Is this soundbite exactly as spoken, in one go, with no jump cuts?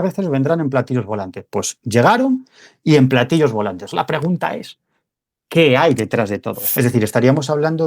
no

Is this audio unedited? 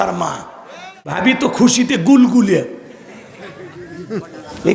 no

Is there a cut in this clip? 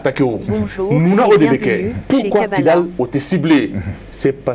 no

